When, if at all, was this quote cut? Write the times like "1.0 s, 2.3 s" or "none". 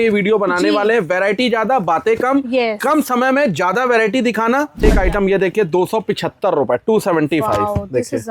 4.8 s